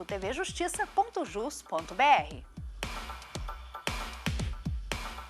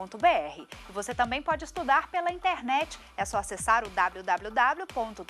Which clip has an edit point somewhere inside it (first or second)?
first